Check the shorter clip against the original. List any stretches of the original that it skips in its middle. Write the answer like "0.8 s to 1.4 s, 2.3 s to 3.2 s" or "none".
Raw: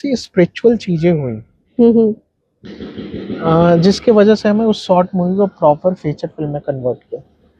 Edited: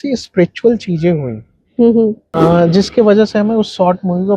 2.2 s to 3.3 s